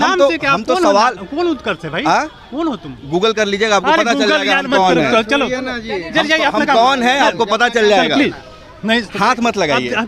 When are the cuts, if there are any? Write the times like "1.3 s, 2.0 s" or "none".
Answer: none